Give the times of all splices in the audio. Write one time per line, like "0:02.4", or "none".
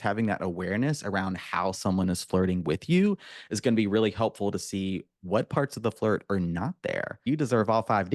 0:07.2